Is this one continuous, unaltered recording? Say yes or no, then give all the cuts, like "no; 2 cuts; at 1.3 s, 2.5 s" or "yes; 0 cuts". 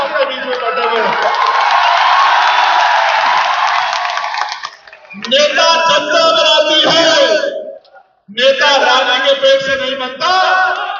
yes; 0 cuts